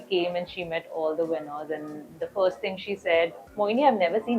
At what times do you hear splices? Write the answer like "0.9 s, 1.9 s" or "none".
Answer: 3.4 s